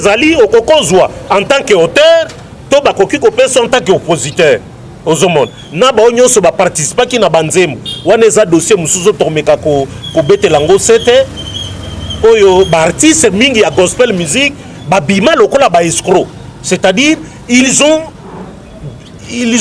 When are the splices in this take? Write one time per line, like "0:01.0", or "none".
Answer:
none